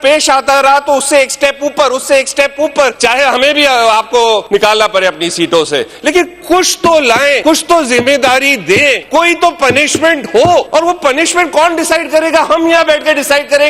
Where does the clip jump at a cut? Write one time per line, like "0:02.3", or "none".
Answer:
0:02.9
0:04.4
0:07.4
0:09.0
0:10.7